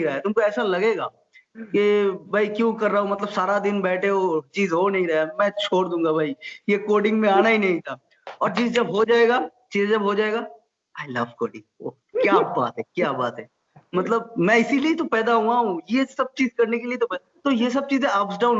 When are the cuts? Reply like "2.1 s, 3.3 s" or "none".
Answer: none